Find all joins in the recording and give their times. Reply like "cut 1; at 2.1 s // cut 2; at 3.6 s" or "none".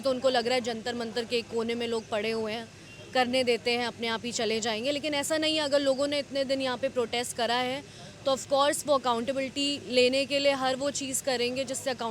none